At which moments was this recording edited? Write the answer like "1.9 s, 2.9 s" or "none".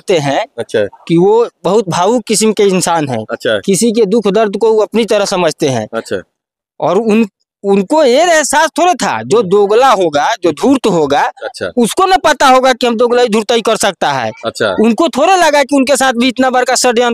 none